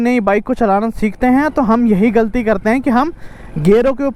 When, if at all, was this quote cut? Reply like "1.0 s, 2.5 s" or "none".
none